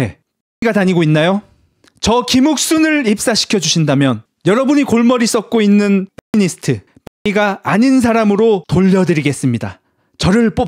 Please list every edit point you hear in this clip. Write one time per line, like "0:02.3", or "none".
none